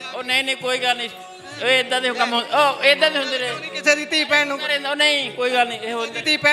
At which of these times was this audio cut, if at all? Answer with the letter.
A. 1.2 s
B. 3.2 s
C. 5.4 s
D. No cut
D